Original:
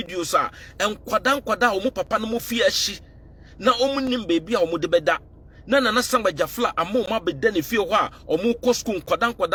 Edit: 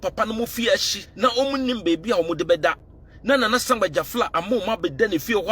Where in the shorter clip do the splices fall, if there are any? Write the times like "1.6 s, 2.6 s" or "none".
1.0 s